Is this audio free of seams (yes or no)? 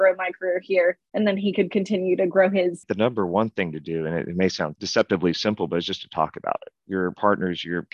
no